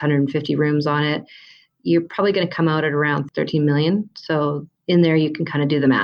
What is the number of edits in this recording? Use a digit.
1